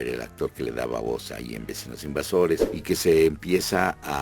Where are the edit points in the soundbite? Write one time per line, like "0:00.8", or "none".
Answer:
0:02.6